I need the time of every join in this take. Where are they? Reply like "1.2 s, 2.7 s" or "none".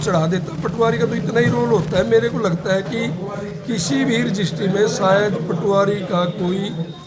none